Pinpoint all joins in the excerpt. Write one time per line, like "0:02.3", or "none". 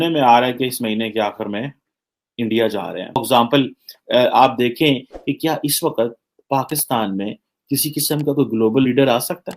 0:03.2